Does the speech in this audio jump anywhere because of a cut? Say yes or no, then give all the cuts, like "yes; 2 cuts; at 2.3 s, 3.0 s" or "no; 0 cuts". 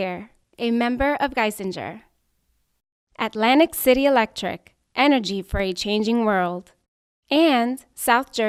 no; 0 cuts